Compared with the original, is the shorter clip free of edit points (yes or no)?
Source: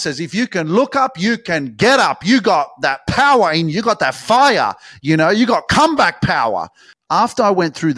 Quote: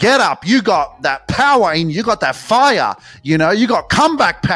yes